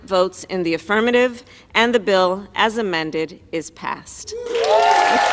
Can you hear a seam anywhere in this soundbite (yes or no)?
no